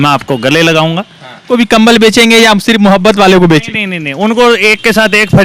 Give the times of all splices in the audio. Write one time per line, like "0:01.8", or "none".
0:01.5